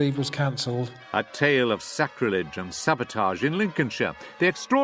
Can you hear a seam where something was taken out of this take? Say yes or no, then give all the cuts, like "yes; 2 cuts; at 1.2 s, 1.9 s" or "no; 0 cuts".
yes; 1 cut; at 1.0 s